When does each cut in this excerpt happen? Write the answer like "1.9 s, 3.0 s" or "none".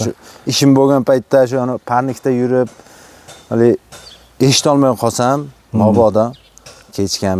none